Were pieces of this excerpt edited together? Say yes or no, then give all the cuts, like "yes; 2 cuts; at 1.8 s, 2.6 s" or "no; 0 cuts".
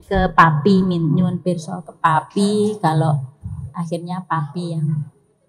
no; 0 cuts